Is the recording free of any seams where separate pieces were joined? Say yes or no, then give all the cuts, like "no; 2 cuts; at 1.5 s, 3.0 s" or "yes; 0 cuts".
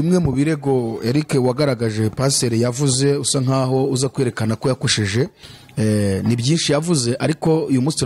yes; 0 cuts